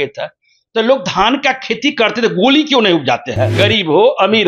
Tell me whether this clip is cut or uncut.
cut